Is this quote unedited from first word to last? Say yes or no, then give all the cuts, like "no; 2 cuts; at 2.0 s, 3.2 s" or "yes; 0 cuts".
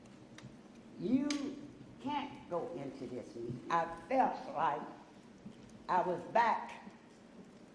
no; 1 cut; at 3.6 s